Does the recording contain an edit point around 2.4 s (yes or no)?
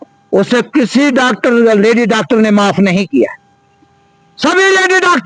no